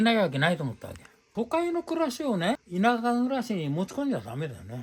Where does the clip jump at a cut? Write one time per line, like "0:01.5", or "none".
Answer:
0:01.3
0:02.7